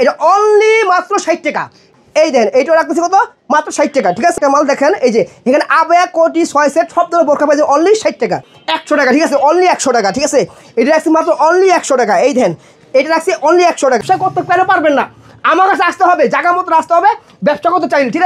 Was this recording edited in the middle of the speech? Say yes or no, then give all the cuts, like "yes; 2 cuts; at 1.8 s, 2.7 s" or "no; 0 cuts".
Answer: yes; 4 cuts; at 1.9 s, 4.4 s, 8.4 s, 14.0 s